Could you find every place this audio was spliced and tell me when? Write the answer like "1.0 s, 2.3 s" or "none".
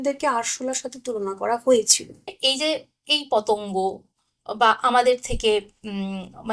2.4 s